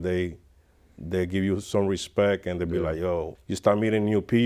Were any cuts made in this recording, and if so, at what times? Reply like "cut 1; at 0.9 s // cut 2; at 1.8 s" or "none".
cut 1; at 3.4 s